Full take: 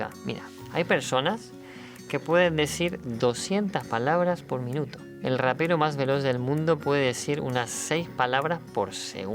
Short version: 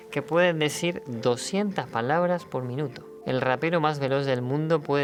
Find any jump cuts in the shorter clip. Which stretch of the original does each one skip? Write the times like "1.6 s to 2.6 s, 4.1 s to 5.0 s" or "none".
none